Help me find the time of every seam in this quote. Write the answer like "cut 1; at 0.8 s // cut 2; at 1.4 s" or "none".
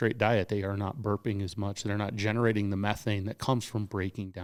none